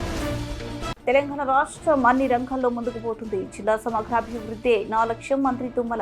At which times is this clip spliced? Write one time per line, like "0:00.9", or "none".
0:01.0